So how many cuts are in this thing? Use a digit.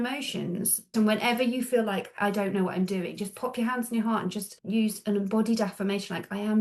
3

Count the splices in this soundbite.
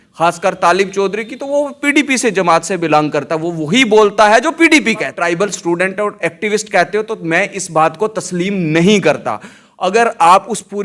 1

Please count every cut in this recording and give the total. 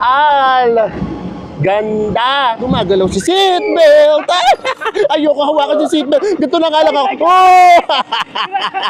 1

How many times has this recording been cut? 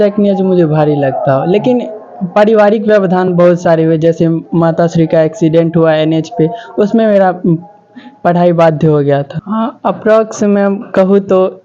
1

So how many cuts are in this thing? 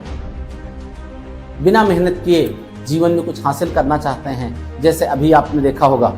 1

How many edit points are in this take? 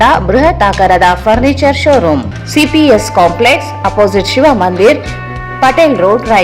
1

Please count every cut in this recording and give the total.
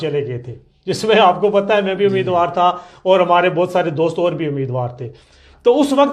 0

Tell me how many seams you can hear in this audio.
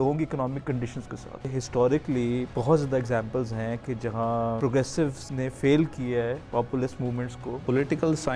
6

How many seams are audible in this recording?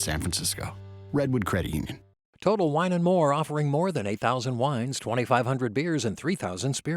1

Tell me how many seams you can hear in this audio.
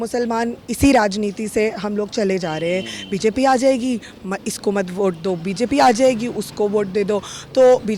0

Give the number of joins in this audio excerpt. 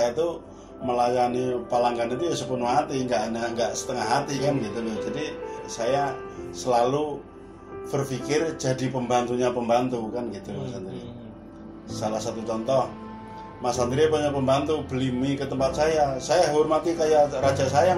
0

